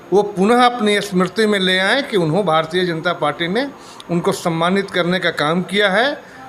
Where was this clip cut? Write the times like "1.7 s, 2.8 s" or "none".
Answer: none